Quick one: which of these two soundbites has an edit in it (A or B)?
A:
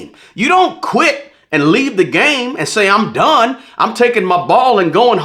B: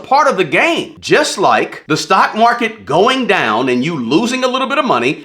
B